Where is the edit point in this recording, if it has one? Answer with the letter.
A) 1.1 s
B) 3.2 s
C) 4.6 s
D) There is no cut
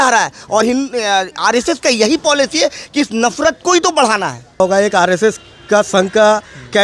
C